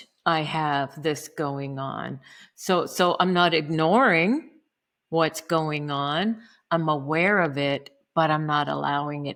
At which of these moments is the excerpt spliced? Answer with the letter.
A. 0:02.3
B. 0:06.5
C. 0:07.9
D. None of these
D